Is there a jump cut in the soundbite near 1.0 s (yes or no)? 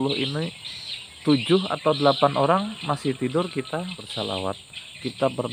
no